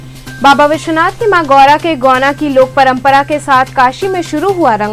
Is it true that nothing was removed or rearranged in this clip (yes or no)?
yes